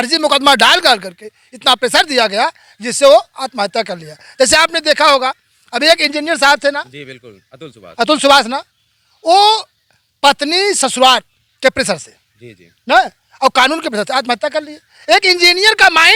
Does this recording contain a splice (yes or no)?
no